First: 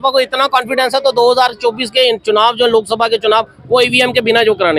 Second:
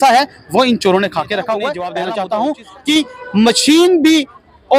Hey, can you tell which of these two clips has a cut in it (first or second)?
second